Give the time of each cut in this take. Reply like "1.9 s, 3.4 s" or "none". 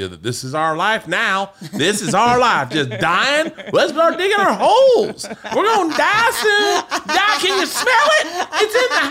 none

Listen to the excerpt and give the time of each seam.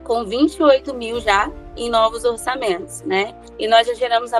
3.4 s

